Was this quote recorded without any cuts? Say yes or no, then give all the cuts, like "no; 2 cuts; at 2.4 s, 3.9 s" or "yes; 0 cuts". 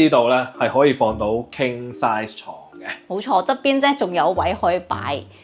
yes; 0 cuts